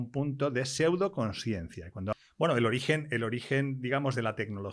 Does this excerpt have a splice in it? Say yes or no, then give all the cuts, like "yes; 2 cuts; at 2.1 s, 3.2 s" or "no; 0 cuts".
yes; 1 cut; at 1.9 s